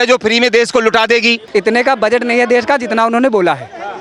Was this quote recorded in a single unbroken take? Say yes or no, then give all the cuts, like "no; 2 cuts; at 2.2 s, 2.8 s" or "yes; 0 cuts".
no; 1 cut; at 1.4 s